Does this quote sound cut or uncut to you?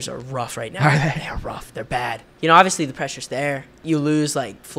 cut